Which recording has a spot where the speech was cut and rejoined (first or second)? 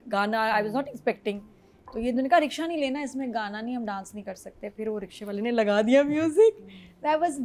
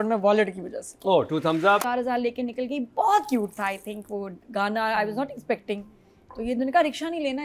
second